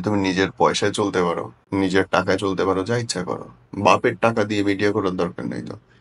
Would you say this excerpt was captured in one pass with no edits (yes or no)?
no